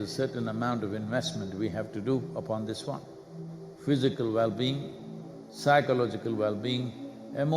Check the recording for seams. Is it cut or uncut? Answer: cut